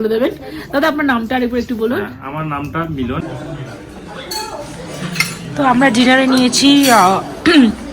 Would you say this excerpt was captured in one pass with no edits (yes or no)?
no